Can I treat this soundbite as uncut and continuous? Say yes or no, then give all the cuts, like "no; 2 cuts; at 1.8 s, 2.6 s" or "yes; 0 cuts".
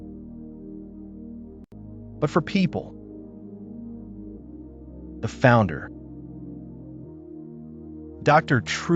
no; 4 cuts; at 3.0 s, 4.7 s, 6.3 s, 8.2 s